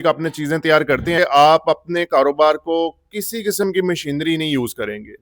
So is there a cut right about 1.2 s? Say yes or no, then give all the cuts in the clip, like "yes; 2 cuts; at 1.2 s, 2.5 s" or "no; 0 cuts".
yes; 1 cut; at 1.2 s